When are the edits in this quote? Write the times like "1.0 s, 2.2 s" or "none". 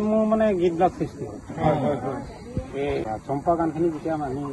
3.1 s